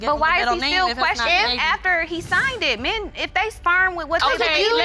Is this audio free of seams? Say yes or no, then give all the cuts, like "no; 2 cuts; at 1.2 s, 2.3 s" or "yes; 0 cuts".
yes; 0 cuts